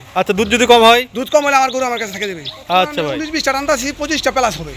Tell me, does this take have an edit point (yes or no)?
yes